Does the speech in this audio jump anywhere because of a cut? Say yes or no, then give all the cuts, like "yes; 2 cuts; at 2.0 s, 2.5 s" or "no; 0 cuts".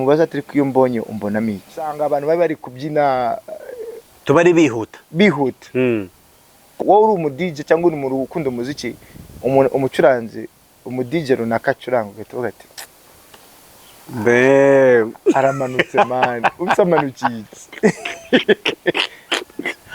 yes; 1 cut; at 1.9 s